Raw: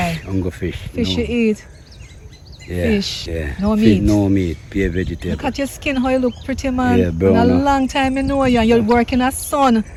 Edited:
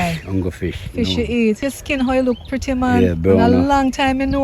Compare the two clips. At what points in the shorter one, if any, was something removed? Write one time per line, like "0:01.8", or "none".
0:01.6

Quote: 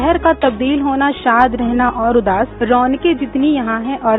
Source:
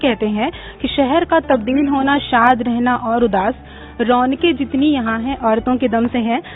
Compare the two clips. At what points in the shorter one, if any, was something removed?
0:02.6

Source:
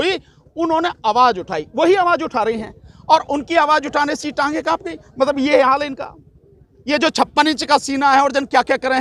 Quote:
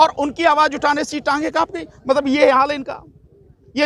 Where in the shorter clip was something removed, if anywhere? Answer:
none

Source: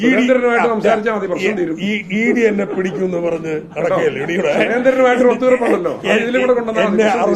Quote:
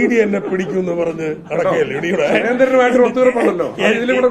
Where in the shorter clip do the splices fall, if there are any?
none

